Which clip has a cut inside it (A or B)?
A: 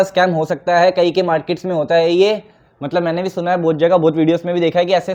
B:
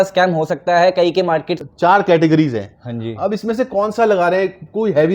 B